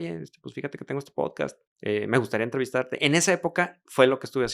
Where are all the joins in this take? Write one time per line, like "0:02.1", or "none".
0:01.7